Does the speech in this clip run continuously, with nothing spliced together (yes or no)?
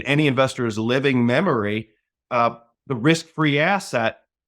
yes